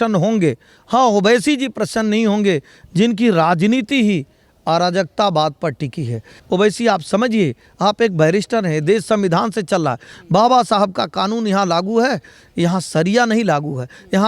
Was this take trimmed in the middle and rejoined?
yes; 1 cut; at 6.3 s

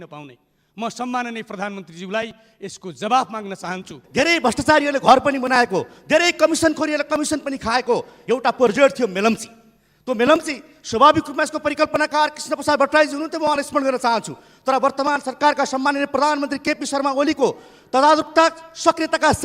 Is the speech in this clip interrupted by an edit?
yes; 1 cut; at 4.0 s

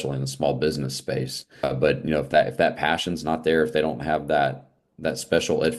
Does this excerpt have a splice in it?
yes; 1 cut; at 1.6 s

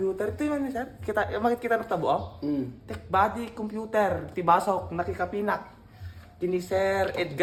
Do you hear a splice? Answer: no; 0 cuts

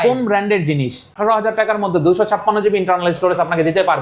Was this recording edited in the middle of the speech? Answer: yes; 1 cut; at 1.1 s

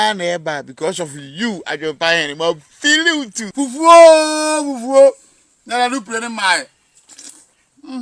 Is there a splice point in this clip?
yes; 1 cut; at 3.5 s

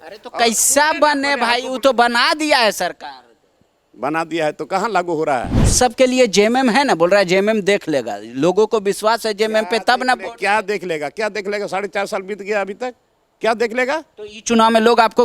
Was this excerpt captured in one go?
no; 1 cut; at 5.6 s

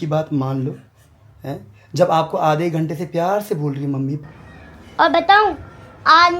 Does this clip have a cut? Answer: yes; 1 cut; at 4.2 s

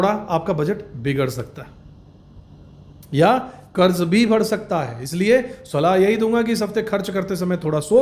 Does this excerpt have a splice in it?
no; 0 cuts

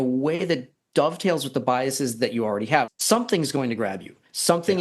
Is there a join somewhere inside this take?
yes; 1 cut; at 3.0 s

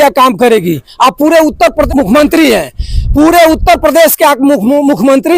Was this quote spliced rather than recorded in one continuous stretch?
yes; 1 cut; at 1.9 s

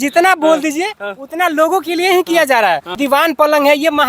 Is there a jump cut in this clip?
yes; 1 cut; at 3.0 s

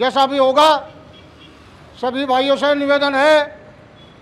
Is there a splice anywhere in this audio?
no; 0 cuts

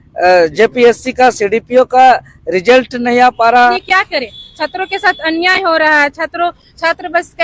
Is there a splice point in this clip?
yes; 1 cut; at 3.7 s

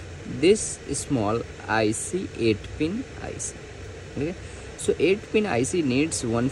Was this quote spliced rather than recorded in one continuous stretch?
no; 0 cuts

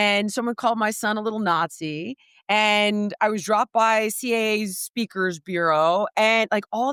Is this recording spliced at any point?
no; 0 cuts

